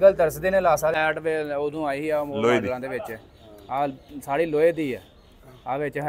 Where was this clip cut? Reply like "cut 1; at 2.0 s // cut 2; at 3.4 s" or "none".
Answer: cut 1; at 1.0 s